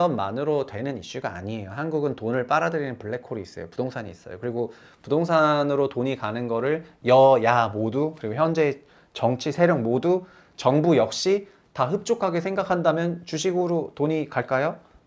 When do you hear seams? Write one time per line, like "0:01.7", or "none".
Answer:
none